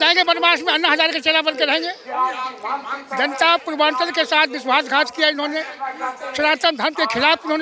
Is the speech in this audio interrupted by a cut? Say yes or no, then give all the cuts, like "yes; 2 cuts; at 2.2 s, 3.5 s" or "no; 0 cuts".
no; 0 cuts